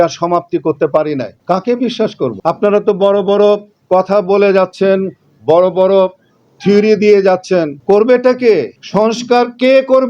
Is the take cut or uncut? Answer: cut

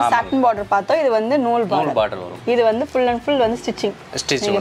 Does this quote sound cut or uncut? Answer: uncut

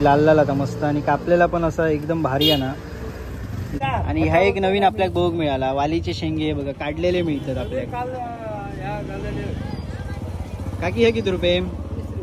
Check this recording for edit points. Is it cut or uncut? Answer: cut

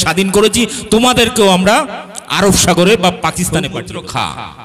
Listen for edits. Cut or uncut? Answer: cut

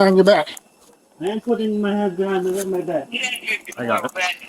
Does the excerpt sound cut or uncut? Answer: uncut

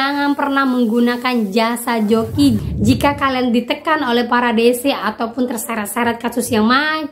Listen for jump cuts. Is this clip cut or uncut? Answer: uncut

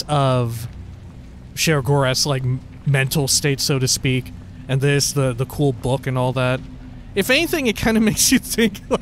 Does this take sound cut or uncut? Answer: uncut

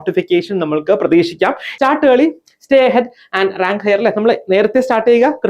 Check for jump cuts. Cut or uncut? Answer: cut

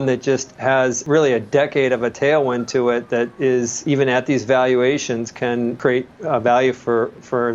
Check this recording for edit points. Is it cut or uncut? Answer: cut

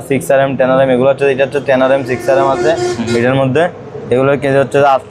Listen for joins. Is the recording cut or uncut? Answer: uncut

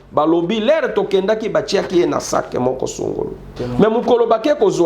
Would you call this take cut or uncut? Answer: cut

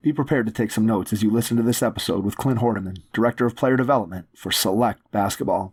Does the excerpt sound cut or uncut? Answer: uncut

